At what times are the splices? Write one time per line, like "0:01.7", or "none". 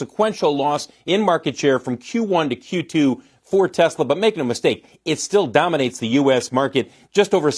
none